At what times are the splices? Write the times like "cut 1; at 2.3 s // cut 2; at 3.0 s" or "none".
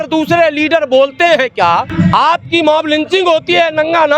cut 1; at 1.9 s